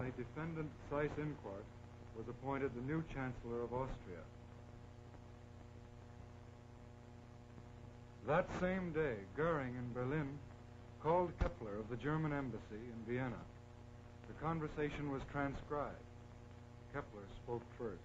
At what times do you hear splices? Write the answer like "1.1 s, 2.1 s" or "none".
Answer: 2.4 s